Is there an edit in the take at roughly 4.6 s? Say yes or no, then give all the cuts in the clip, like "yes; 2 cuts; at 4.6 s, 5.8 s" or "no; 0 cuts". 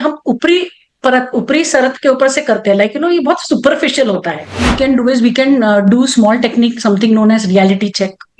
yes; 1 cut; at 4.6 s